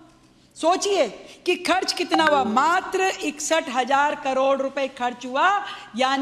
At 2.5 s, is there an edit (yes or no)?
yes